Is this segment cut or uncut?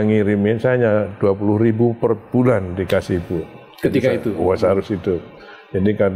uncut